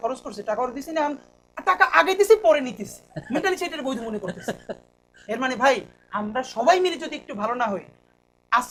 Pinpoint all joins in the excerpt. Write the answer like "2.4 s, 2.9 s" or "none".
none

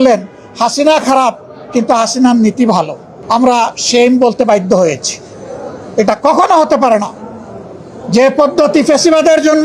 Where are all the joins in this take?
none

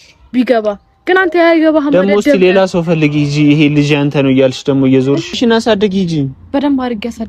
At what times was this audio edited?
5.3 s

